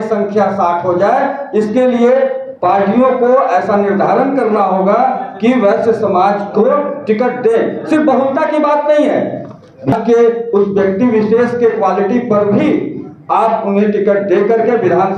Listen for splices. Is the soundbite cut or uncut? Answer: uncut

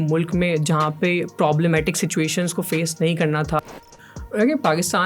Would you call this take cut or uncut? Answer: cut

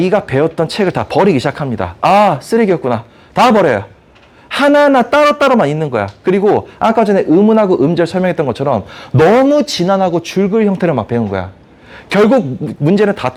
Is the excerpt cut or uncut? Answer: uncut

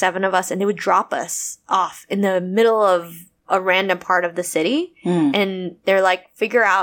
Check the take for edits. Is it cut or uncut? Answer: uncut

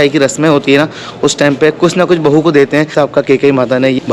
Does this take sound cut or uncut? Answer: uncut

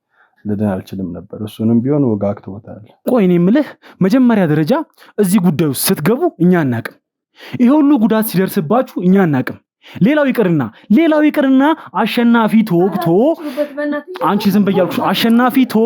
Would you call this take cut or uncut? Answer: uncut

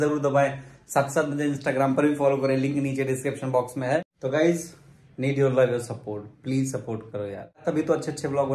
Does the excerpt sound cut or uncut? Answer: cut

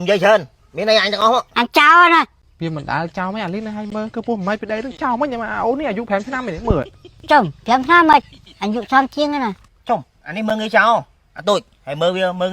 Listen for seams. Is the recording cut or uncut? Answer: cut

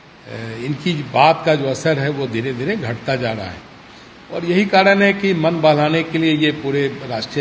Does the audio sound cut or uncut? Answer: uncut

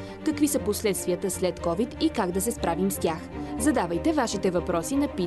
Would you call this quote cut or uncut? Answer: uncut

